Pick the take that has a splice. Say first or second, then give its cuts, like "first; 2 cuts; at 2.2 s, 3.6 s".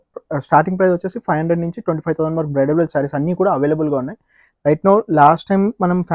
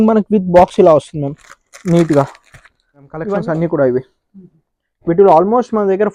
second; 1 cut; at 3.2 s